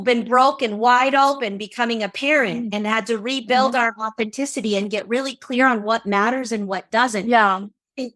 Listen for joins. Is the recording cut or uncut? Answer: uncut